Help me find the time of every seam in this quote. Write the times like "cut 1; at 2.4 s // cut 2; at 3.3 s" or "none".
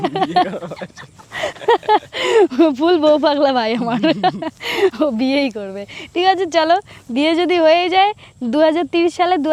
none